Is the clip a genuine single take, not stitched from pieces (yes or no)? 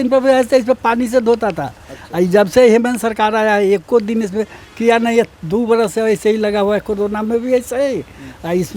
yes